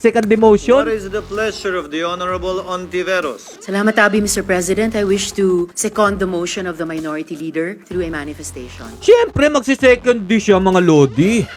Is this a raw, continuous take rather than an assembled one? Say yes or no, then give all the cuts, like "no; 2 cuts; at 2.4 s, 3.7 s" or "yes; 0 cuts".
yes; 0 cuts